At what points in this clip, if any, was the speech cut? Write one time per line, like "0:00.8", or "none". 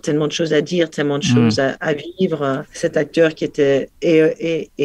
0:02.7
0:03.9